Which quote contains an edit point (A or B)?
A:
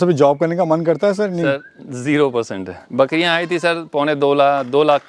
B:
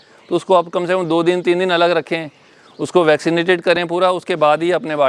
A